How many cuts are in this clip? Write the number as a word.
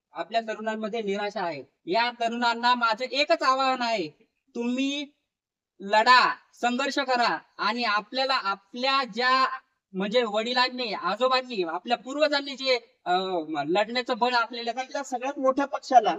one